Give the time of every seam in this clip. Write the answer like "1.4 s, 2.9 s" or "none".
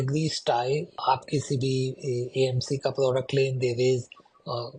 1.0 s